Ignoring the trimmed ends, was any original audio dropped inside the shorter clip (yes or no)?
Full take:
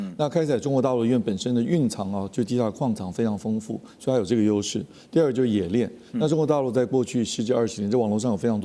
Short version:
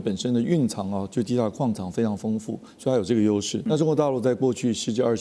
yes